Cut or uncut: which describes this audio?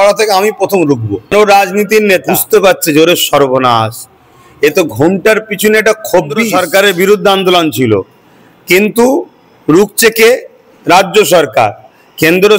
cut